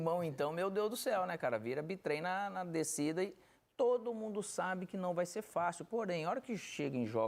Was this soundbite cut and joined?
no; 0 cuts

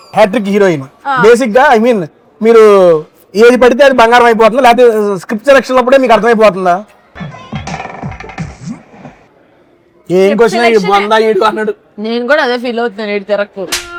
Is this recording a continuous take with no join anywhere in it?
yes; 0 cuts

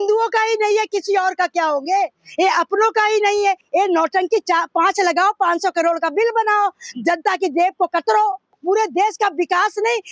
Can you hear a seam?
yes; 2 cuts; at 3.6 s, 8.6 s

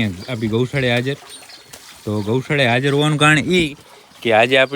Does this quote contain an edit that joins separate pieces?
no; 0 cuts

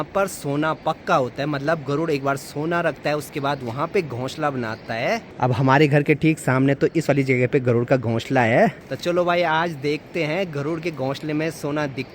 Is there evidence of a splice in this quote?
no; 0 cuts

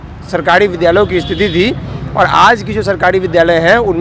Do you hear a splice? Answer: no; 0 cuts

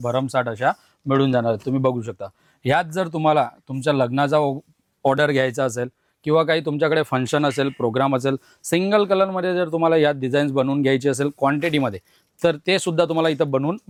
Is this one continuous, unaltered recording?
yes; 0 cuts

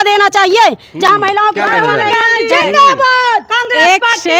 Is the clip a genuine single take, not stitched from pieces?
yes; 0 cuts

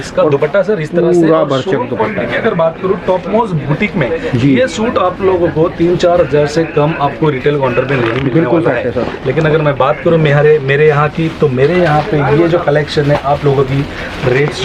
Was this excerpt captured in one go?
yes; 0 cuts

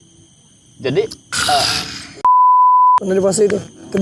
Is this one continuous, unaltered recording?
no; 2 cuts; at 2.0 s, 3.0 s

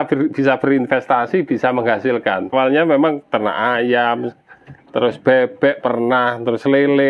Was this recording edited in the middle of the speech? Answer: yes; 1 cut; at 2.5 s

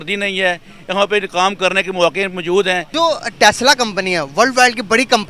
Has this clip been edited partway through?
yes; 1 cut; at 2.9 s

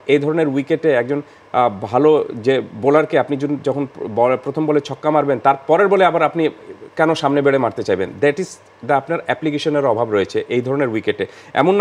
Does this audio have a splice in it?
no; 0 cuts

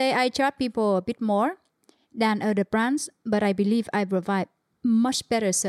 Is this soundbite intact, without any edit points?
yes; 0 cuts

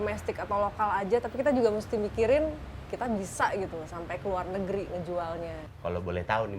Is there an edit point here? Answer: no; 0 cuts

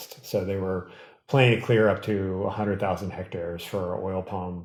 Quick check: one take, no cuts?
yes; 0 cuts

